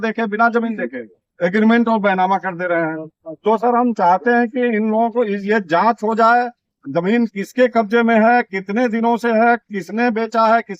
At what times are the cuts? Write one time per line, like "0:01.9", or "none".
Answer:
none

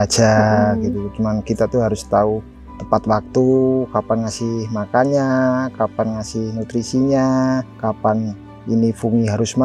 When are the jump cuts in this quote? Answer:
none

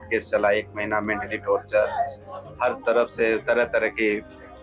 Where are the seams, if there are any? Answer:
none

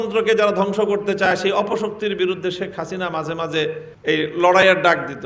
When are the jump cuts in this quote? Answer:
0:03.9

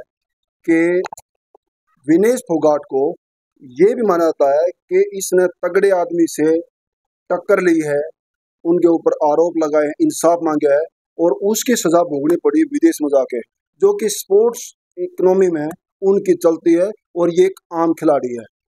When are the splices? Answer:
none

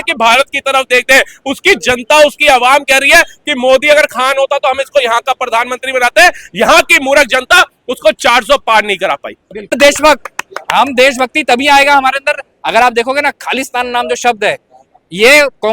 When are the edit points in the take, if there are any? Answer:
0:09.7

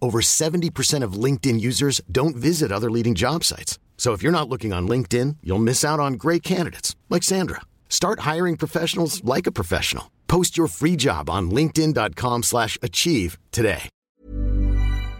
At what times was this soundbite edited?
0:13.9

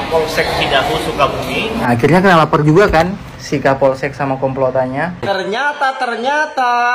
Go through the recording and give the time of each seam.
0:01.8
0:05.2

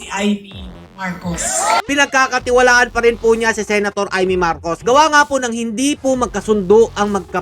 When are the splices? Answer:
0:01.9

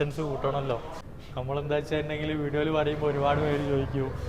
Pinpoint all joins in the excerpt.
0:00.9

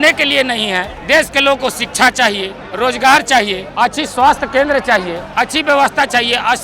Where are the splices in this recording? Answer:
0:00.9
0:02.6
0:03.6
0:05.2

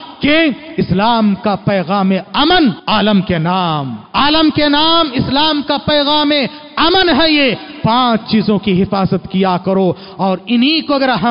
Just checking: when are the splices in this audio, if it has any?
0:02.8
0:04.0

